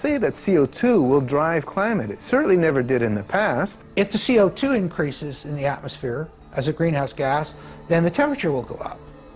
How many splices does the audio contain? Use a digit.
1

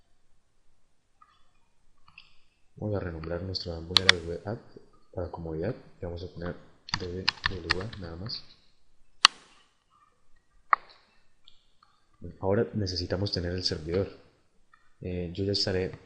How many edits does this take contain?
1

